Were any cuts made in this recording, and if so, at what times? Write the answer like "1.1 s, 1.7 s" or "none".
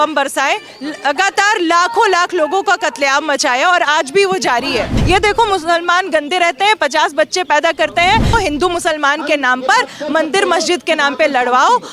4.9 s, 8.3 s